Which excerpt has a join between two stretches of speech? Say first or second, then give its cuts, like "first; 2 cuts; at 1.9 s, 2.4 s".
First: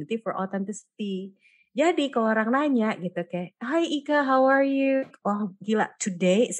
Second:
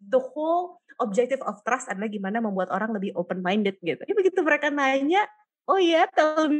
first; 1 cut; at 5.0 s